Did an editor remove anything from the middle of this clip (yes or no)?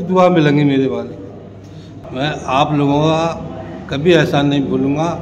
yes